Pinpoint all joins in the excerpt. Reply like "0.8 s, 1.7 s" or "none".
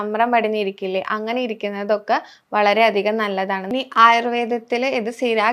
3.6 s